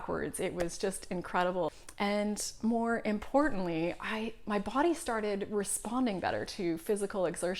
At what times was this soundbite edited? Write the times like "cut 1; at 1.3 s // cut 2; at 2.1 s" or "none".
cut 1; at 1.7 s